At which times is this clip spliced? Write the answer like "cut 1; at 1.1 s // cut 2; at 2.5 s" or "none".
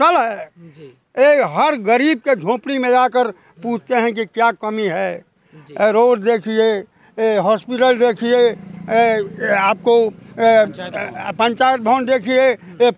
none